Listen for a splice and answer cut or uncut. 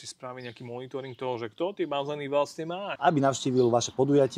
cut